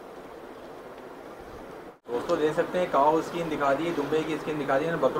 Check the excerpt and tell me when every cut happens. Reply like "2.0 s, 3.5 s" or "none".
2.1 s